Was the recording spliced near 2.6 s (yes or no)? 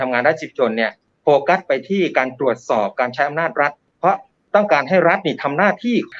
no